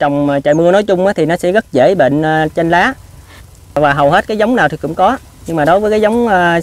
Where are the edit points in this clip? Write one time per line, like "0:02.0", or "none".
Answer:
none